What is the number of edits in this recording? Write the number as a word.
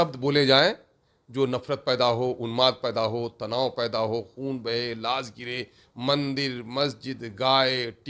zero